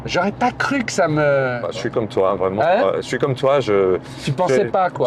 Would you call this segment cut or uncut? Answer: cut